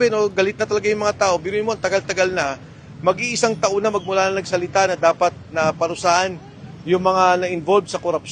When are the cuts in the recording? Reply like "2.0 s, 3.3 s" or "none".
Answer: none

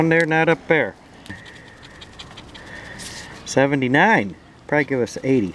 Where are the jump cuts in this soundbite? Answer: 1.3 s

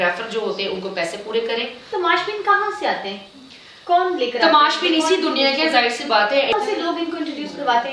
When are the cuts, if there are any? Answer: 1.9 s, 6.5 s

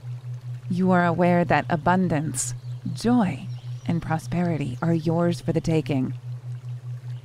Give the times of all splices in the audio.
none

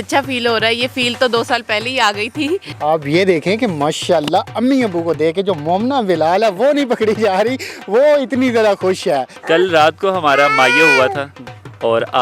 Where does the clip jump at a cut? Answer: 2.7 s, 9.3 s

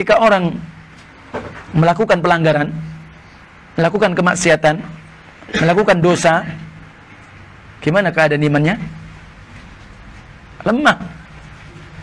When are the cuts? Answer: none

